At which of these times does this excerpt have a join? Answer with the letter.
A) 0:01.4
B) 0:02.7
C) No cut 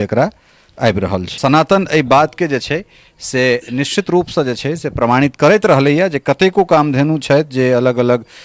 A